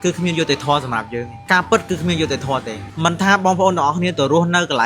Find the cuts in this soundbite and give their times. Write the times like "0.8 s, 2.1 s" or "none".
1.3 s